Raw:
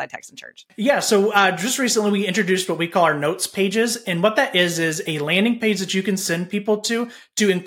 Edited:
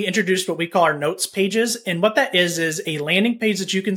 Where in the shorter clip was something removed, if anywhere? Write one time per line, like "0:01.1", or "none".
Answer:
none

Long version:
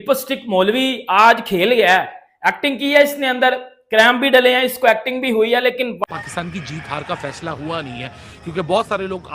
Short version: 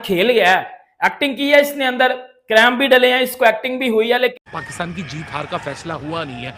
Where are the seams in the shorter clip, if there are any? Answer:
0:04.4

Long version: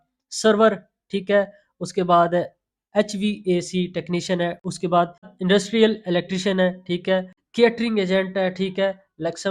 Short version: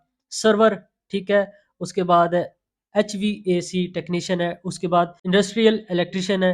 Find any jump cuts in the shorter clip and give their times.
0:05.2

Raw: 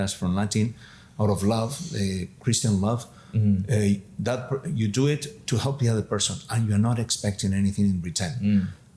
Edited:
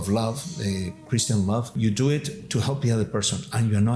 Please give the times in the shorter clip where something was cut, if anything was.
0:01.7

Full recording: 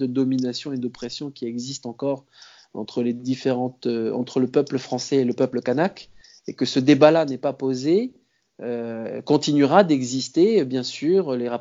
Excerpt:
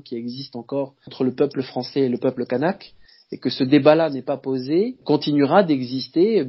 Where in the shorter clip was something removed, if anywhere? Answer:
0:01.1
0:05.0

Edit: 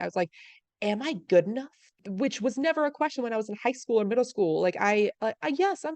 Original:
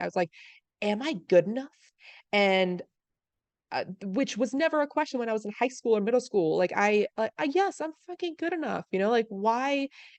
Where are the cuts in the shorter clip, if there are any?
0:02.0

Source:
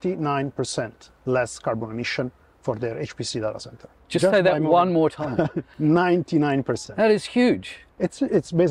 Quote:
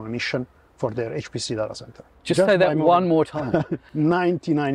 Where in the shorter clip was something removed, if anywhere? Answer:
none

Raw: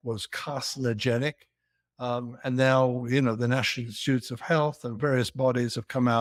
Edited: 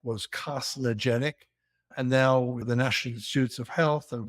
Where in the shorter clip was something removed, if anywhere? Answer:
0:01.8
0:02.6

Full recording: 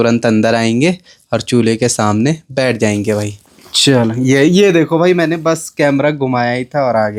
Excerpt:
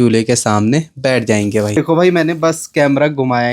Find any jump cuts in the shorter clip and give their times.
0:01.8

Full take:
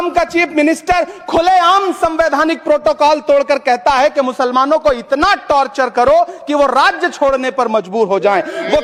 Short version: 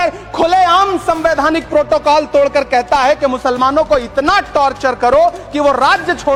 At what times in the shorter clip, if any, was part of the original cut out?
none

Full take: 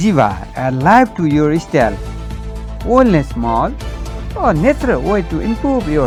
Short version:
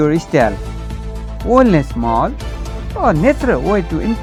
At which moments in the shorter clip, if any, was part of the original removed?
none

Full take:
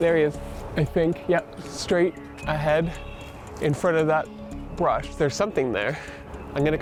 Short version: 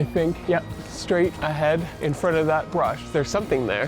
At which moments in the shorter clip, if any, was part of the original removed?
0:01.5
0:02.7

